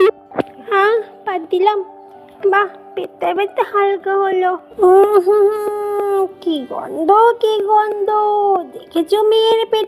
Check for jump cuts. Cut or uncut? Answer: cut